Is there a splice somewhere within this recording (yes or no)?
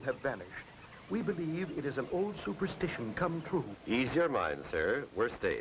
yes